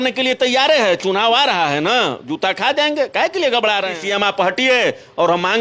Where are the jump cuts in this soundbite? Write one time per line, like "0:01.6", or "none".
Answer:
0:04.0